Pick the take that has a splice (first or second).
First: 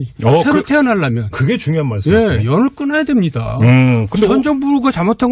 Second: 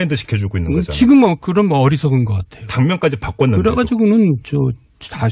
first